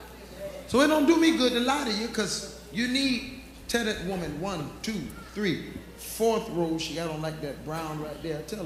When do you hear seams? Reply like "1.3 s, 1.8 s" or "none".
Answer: 5.8 s